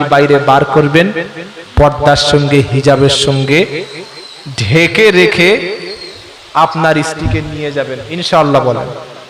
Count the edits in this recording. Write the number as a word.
zero